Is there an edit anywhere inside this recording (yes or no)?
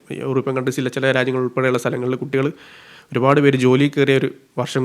no